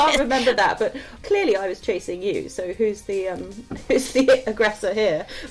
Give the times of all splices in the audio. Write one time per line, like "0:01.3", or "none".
0:01.1